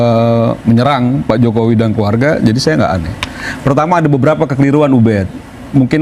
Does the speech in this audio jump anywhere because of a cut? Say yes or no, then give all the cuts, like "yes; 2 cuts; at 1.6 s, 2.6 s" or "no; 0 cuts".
no; 0 cuts